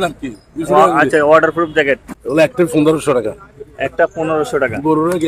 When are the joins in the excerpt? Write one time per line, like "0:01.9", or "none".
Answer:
0:02.5